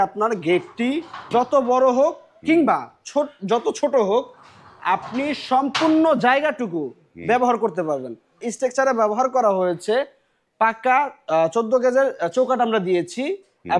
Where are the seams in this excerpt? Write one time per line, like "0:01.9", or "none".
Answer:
0:01.1
0:08.4

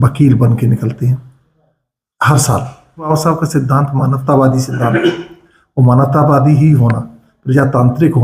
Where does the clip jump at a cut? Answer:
0:03.1

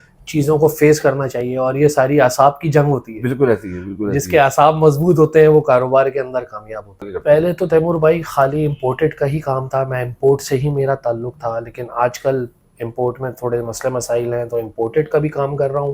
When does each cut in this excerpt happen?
0:07.1

